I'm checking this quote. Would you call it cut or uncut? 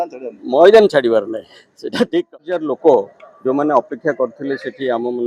cut